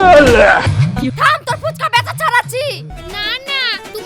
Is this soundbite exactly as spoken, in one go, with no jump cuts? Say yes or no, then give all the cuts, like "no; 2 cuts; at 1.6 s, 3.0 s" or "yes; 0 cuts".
no; 2 cuts; at 1.1 s, 2.9 s